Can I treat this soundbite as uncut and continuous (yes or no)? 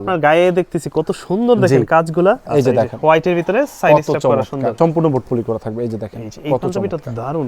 no